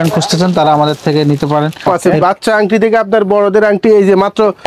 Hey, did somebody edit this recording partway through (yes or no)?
yes